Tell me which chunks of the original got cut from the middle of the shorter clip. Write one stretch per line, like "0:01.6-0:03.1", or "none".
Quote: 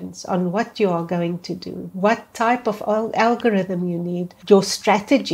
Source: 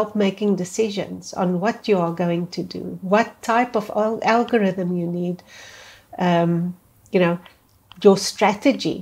0:05.4-0:07.8